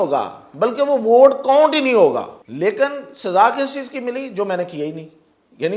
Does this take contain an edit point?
yes; 1 cut; at 2.4 s

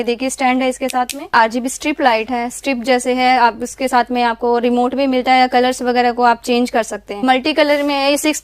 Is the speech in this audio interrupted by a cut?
yes; 2 cuts; at 1.3 s, 7.2 s

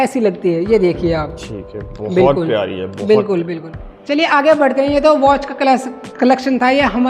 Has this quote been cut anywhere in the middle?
no; 0 cuts

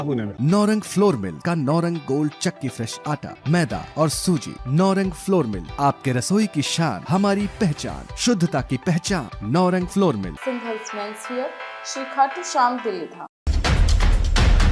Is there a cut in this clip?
no; 0 cuts

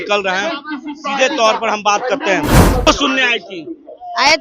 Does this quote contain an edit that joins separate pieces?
yes; 1 cut; at 2.9 s

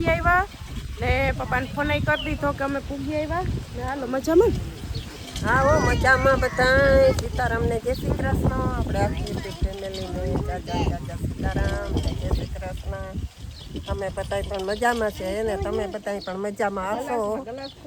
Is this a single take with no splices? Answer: yes; 0 cuts

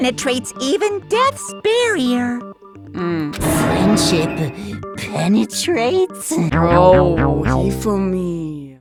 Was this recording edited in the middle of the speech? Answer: no; 0 cuts

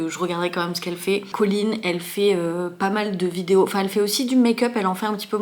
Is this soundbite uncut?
yes; 0 cuts

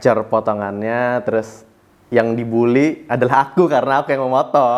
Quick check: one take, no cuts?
yes; 0 cuts

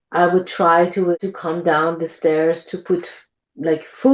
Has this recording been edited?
yes; 1 cut; at 1.1 s

